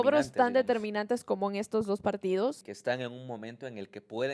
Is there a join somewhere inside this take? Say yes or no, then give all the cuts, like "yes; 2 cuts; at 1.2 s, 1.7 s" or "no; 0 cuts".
yes; 1 cut; at 2.7 s